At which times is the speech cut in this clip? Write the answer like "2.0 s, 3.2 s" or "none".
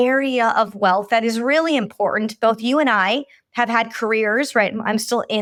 none